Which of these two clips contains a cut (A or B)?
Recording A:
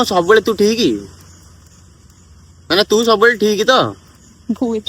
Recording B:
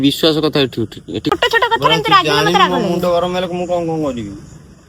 B